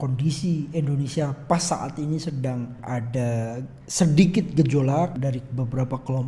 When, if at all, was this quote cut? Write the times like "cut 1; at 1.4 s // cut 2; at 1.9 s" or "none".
cut 1; at 2.8 s // cut 2; at 5.2 s